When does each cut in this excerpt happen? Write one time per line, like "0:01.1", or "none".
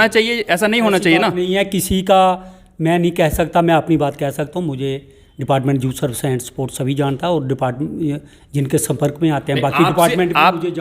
none